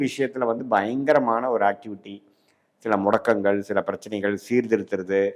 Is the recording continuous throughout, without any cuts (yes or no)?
yes